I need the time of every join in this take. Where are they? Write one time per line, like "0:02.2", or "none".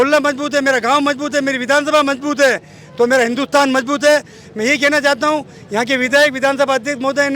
none